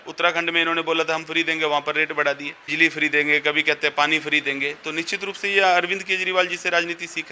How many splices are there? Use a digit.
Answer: 1